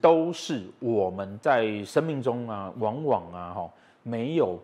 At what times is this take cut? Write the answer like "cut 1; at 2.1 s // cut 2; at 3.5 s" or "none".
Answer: none